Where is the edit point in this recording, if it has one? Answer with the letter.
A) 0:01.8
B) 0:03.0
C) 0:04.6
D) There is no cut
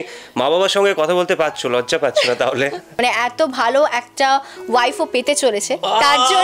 B